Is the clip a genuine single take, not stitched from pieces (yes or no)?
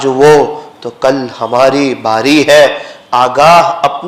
yes